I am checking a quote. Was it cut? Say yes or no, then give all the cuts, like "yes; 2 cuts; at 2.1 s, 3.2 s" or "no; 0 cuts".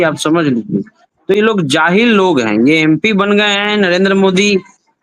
no; 0 cuts